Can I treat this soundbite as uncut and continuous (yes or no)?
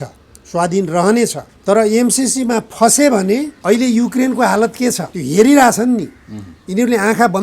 no